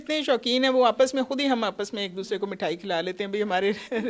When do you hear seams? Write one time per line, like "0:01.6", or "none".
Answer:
none